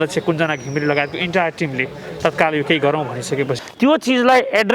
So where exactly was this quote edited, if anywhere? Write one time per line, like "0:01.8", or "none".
0:03.6